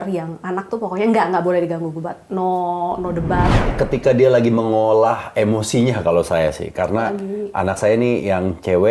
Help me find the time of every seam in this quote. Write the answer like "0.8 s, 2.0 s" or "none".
3.6 s